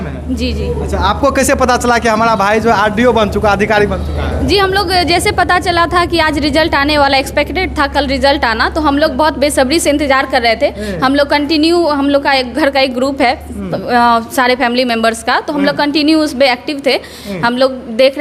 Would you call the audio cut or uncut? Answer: uncut